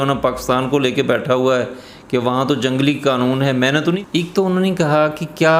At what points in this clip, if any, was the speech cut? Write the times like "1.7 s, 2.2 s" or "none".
3.8 s